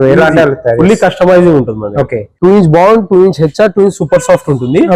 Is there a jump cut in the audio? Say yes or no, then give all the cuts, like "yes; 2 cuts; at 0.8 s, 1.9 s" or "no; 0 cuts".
yes; 1 cut; at 2.3 s